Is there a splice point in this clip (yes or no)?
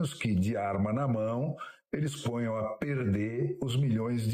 no